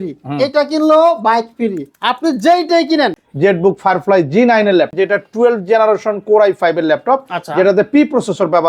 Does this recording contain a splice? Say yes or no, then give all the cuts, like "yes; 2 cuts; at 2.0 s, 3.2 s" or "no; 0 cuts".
yes; 2 cuts; at 3.2 s, 4.9 s